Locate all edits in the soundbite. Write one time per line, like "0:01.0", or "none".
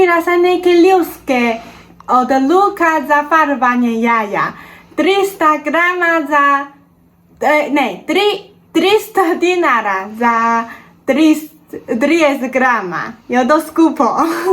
none